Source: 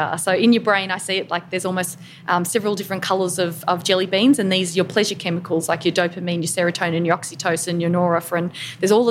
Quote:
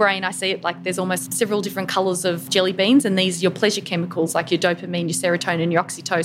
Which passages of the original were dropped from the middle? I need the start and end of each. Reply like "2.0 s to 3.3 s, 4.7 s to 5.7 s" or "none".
2.0 s to 2.5 s, 3.6 s to 3.8 s